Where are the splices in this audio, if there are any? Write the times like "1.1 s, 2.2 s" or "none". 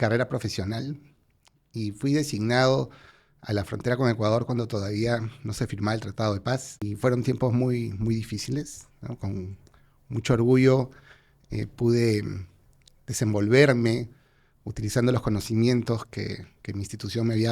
6.8 s

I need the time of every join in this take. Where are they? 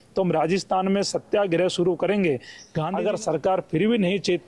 2.6 s

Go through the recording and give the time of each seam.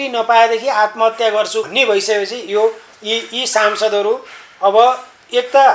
1.7 s

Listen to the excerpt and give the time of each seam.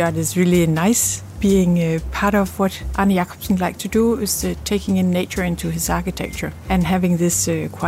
2.8 s, 6.5 s

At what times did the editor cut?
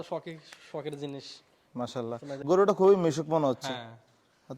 2.4 s

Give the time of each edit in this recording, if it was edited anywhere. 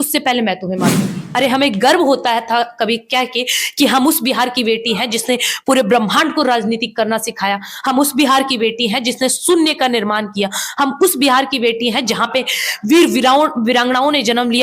1.2 s

